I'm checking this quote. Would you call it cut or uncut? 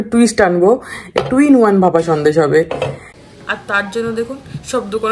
cut